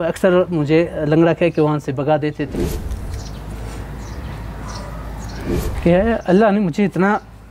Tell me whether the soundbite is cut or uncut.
cut